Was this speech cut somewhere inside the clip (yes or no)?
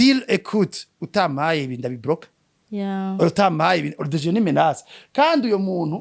no